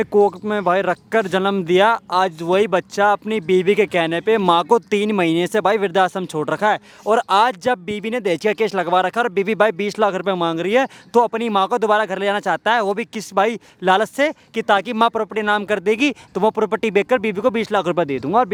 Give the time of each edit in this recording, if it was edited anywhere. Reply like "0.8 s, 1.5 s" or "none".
none